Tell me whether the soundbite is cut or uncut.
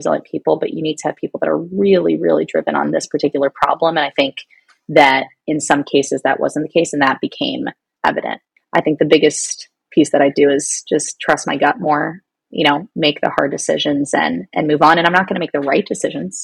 cut